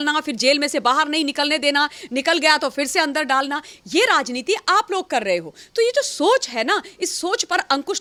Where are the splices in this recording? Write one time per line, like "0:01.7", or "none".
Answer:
none